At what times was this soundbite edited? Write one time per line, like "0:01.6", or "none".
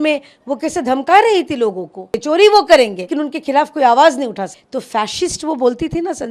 0:02.2
0:03.0
0:04.5